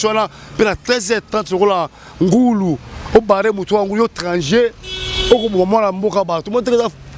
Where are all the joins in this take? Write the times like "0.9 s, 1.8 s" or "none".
none